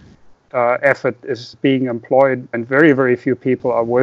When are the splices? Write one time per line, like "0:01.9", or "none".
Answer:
0:01.5
0:02.6